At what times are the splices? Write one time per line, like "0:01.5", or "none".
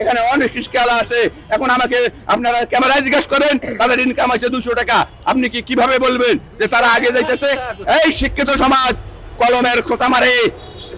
0:07.8